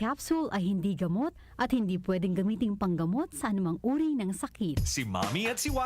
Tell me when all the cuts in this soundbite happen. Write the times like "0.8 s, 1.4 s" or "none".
4.8 s